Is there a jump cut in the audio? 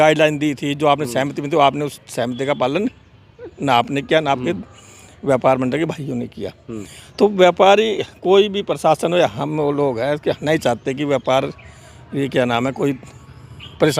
no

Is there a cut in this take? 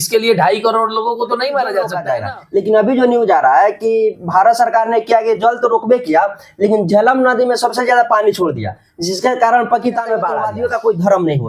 yes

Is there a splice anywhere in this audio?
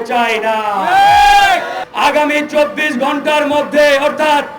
yes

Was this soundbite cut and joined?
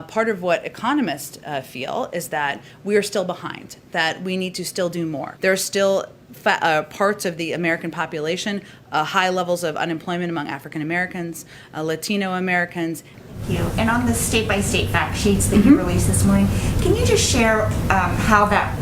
yes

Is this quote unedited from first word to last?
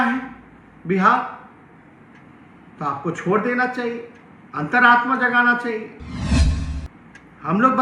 yes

